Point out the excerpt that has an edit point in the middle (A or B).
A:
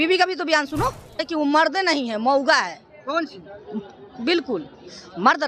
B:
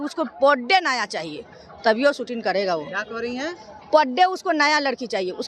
A